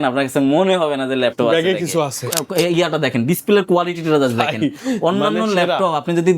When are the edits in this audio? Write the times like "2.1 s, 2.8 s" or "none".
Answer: 2.3 s